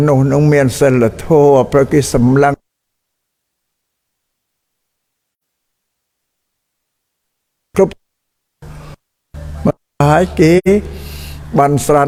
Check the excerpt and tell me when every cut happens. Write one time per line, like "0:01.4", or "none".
none